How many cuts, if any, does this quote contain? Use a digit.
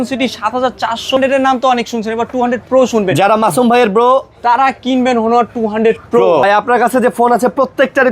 2